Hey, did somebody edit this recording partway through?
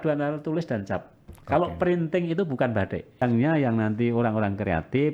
yes; 1 cut; at 3.2 s

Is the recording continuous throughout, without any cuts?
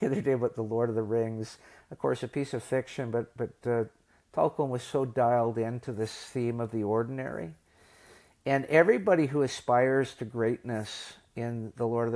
yes; 0 cuts

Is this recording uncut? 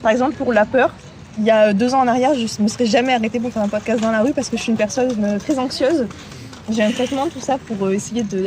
no; 1 cut; at 1.1 s

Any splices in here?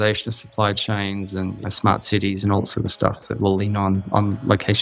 no; 0 cuts

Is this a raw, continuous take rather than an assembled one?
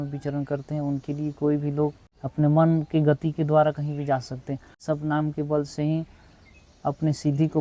no; 2 cuts; at 2.1 s, 4.8 s

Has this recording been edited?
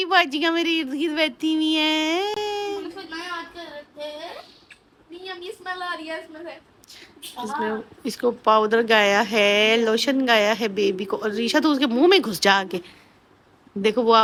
no; 0 cuts

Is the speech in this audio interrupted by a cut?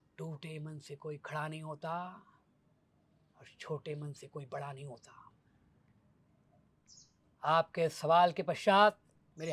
yes; 1 cut; at 6.7 s

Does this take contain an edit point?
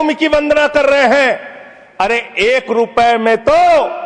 no; 0 cuts

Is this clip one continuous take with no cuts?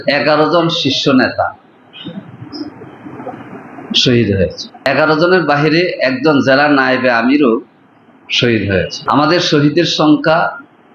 no; 2 cuts; at 4.9 s, 9.0 s

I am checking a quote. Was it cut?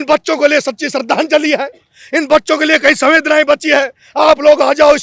no; 0 cuts

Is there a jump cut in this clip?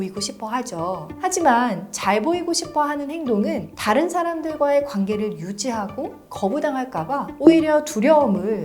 yes; 1 cut; at 1.1 s

